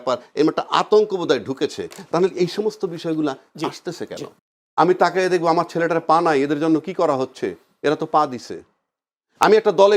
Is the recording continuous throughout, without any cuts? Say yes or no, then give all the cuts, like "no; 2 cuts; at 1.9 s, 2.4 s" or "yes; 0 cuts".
no; 1 cut; at 4.3 s